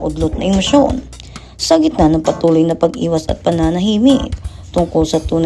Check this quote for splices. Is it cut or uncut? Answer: uncut